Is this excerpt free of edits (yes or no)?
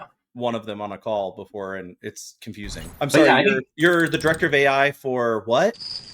no